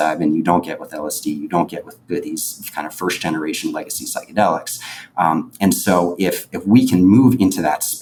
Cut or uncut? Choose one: uncut